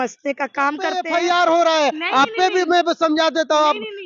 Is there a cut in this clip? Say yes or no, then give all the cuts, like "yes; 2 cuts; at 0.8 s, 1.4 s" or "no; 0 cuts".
yes; 1 cut; at 1.0 s